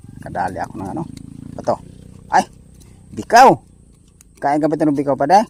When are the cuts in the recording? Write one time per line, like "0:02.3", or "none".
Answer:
none